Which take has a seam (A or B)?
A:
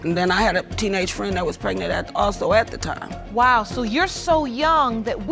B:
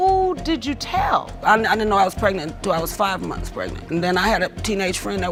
A